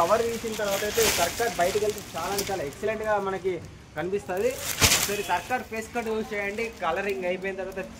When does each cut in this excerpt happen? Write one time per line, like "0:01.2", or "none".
none